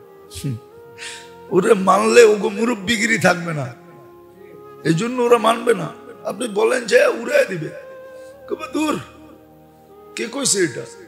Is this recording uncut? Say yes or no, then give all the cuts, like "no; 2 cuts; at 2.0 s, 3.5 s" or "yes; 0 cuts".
yes; 0 cuts